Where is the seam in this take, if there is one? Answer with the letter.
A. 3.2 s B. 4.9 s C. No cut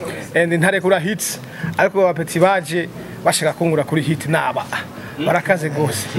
C